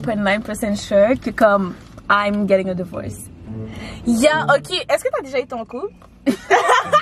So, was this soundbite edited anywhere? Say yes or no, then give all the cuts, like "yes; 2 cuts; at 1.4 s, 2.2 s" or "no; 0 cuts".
no; 0 cuts